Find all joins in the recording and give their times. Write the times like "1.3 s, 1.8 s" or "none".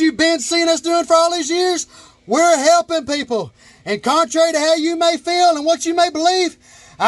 none